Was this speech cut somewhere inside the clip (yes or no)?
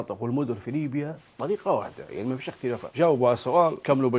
no